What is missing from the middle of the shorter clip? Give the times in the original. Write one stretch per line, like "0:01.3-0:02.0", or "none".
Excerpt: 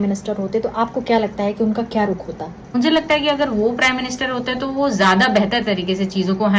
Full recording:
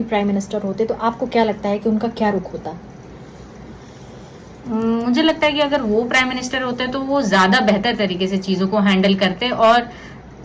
0:03.0-0:05.0